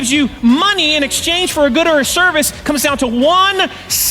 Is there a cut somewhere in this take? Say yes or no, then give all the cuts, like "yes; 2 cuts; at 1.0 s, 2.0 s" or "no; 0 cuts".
no; 0 cuts